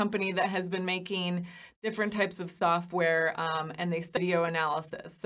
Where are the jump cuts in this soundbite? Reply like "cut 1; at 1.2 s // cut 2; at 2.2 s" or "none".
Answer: cut 1; at 4.2 s